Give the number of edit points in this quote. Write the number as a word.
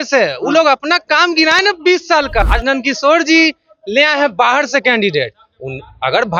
one